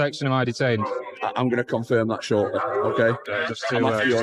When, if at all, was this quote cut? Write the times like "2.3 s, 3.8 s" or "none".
3.3 s